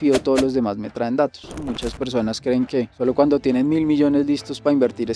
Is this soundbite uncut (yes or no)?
no